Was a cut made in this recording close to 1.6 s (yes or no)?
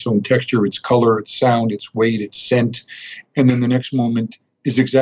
no